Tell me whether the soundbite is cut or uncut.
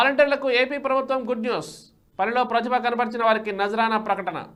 uncut